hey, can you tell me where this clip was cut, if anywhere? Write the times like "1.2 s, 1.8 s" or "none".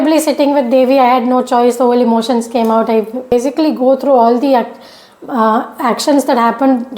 3.3 s